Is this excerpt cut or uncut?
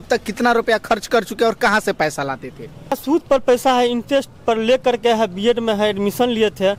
cut